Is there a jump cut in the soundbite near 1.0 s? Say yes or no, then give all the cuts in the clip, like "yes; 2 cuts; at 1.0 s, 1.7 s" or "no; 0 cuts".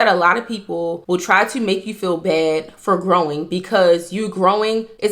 yes; 1 cut; at 1.0 s